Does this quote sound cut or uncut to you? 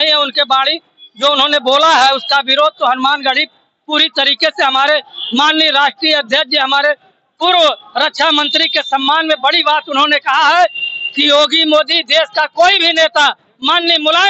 uncut